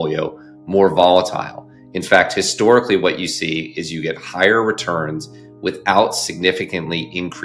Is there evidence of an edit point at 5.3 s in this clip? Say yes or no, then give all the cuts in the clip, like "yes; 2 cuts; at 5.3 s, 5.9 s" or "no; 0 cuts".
no; 0 cuts